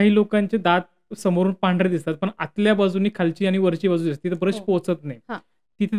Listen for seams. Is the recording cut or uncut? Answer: uncut